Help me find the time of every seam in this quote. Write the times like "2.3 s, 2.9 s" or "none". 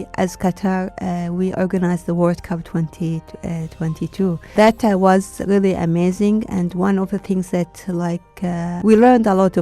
4.5 s, 8.8 s